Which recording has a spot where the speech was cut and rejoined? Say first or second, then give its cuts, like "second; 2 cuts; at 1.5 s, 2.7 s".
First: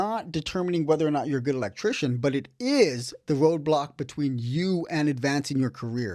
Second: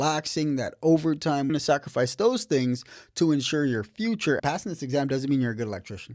second; 2 cuts; at 1.5 s, 4.4 s